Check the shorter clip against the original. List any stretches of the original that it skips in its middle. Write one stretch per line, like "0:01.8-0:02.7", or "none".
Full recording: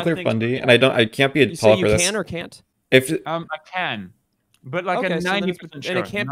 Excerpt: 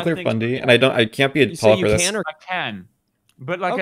0:02.3-0:03.6

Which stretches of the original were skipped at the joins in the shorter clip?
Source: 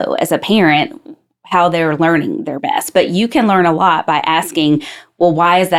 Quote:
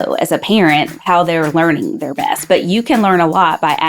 0:00.9-0:01.4

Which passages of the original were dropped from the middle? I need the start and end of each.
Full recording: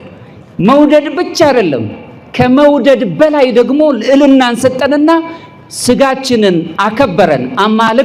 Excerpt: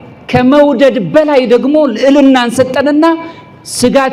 none

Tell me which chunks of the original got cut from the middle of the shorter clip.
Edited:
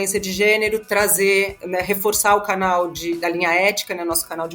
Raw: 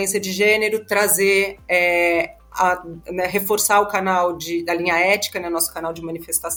0:01.6-0:03.0

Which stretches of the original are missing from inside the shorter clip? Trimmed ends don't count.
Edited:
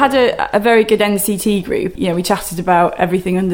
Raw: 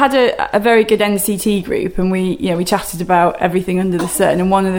0:01.9-0:02.4

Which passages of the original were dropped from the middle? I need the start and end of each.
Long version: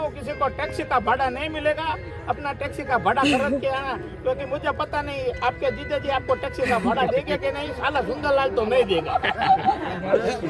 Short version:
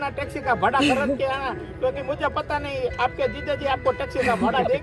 none

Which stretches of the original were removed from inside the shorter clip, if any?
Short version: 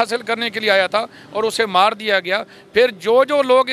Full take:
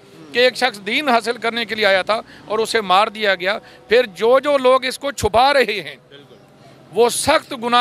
none

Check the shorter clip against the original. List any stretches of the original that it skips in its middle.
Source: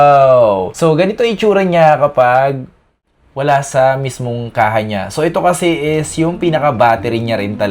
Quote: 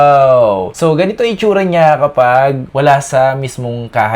0:02.6-0:03.3

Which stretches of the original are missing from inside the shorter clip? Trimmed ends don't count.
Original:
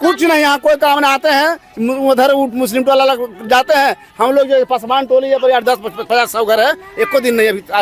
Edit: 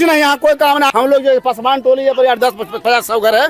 0:01.1-0:04.2

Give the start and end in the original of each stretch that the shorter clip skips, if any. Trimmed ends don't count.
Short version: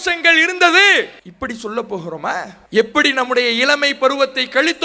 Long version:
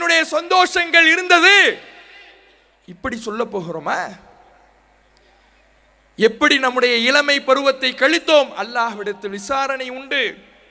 0:01.9-0:02.9
0:04.2-0:06.0

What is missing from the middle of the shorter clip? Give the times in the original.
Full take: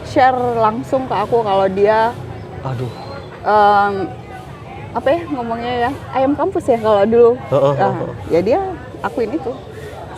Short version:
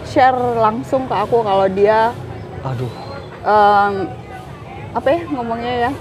none

